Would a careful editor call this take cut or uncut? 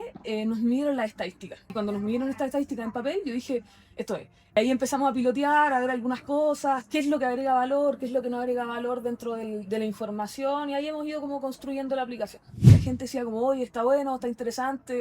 cut